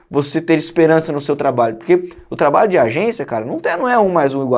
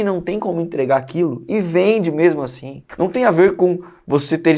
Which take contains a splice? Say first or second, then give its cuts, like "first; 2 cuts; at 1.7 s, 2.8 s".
second; 1 cut; at 2.8 s